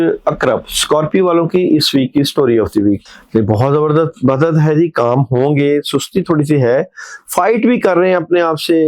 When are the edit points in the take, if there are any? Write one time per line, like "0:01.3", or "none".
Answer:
0:03.0